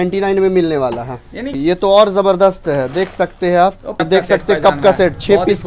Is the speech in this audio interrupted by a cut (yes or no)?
yes